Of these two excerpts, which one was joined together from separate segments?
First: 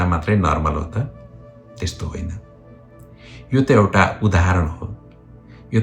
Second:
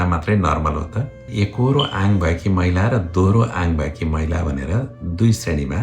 second; 1 cut; at 1.3 s

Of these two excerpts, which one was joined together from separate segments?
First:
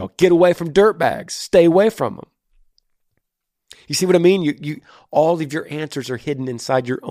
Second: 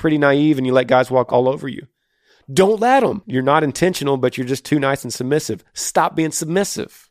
second; 2 cuts; at 1.3 s, 3.2 s

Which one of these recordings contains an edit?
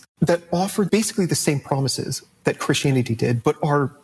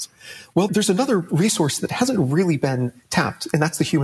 second; 1 cut; at 3.0 s

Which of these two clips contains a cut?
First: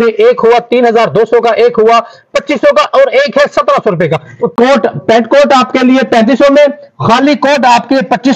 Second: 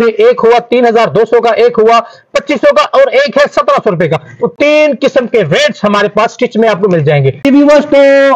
first; 1 cut; at 4.4 s

